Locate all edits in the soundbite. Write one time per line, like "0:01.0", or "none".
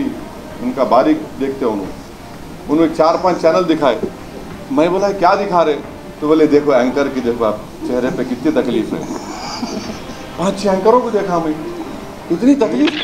0:12.1